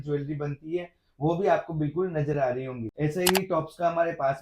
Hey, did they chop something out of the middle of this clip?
yes; 1 cut; at 2.8 s

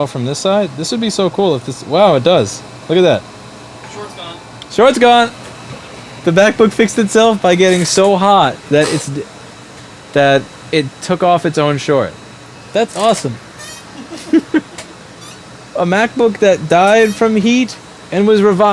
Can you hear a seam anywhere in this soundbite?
no; 0 cuts

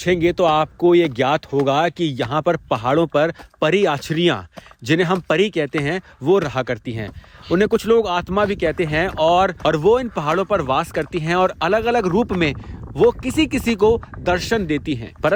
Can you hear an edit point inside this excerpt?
no; 0 cuts

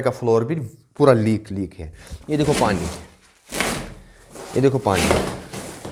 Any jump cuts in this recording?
no; 0 cuts

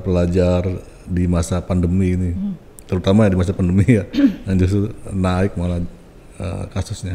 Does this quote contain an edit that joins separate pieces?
no; 0 cuts

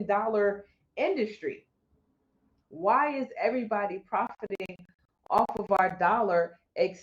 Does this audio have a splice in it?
yes; 1 cut; at 2.5 s

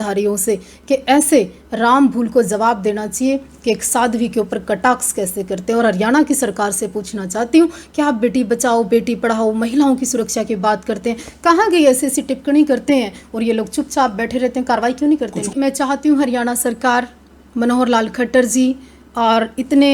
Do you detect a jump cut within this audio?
yes; 1 cut; at 15.5 s

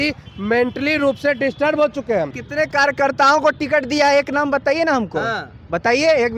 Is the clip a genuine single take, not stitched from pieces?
no; 1 cut; at 2.4 s

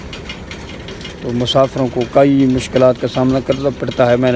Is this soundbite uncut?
yes; 0 cuts

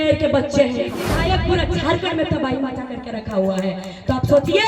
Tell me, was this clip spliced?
yes; 1 cut; at 1.1 s

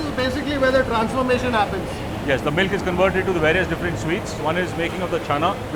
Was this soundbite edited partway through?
no; 0 cuts

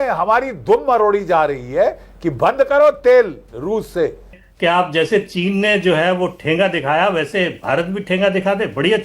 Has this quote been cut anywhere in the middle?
yes; 1 cut; at 4.4 s

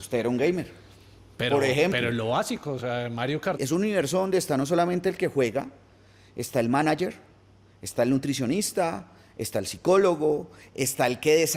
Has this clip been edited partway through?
yes; 1 cut; at 3.5 s

